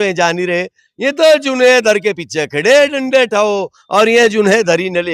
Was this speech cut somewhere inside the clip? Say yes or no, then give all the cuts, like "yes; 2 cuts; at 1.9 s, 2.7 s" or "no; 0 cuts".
no; 0 cuts